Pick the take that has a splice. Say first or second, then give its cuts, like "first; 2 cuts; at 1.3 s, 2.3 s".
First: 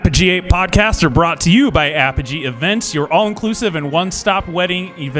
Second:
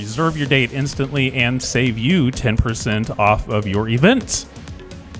second; 1 cut; at 4.2 s